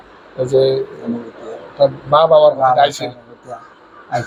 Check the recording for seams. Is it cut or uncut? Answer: uncut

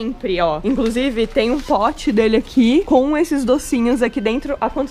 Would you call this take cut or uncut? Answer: uncut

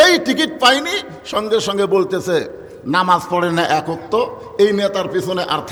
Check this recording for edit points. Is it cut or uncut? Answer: uncut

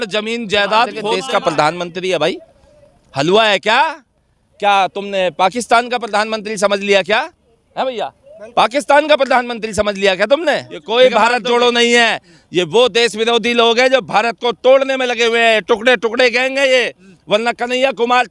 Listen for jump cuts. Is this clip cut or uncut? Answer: cut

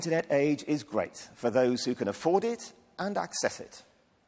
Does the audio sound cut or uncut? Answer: cut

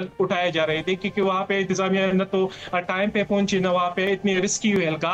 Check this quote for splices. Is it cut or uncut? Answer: uncut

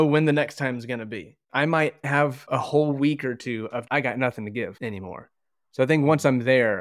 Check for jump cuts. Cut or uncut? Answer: cut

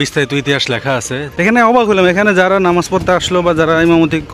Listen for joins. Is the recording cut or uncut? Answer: cut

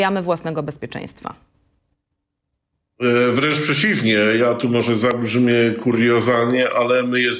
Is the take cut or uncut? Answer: uncut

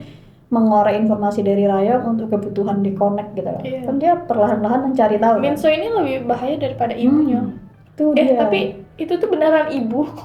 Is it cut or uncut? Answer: uncut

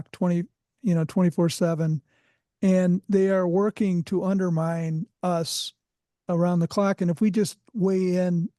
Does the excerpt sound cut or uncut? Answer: uncut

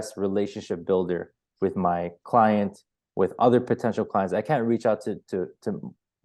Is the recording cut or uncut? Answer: uncut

